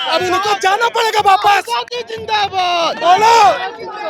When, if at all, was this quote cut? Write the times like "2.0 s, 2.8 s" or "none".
none